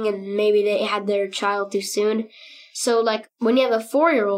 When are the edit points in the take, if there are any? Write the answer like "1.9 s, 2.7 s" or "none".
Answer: 3.3 s